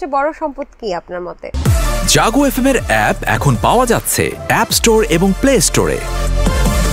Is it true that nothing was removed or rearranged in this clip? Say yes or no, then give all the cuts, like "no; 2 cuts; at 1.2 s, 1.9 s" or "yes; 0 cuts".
no; 1 cut; at 1.5 s